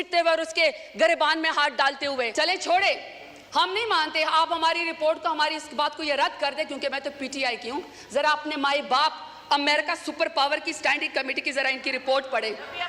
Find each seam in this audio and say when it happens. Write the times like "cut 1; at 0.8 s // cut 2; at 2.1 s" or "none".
cut 1; at 2.3 s